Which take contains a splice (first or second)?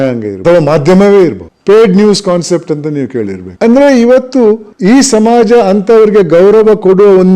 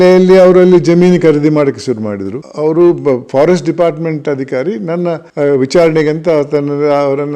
second